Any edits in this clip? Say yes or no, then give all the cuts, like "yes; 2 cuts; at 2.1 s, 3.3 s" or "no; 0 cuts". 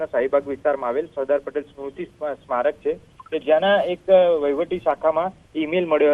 no; 0 cuts